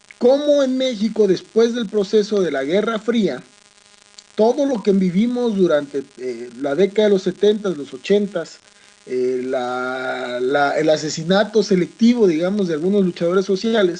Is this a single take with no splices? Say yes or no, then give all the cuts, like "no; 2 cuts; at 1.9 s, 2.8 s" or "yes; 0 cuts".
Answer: no; 1 cut; at 9.5 s